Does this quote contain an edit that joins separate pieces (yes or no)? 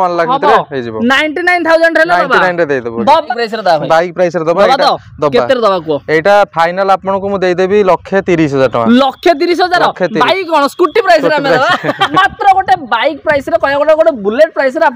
yes